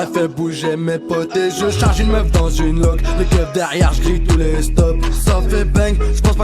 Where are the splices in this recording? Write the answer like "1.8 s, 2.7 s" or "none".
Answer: none